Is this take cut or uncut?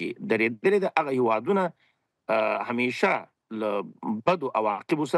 uncut